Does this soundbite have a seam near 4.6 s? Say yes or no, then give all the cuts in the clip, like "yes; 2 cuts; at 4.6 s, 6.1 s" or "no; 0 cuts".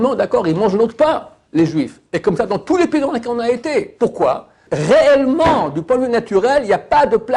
yes; 1 cut; at 4.6 s